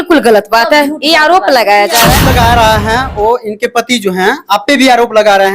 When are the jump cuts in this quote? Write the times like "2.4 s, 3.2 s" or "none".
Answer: 2.2 s